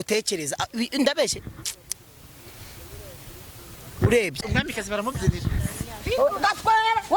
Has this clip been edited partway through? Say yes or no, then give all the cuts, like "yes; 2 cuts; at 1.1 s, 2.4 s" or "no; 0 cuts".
yes; 1 cut; at 4.4 s